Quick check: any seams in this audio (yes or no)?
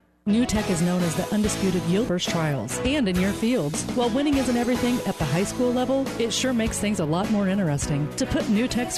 yes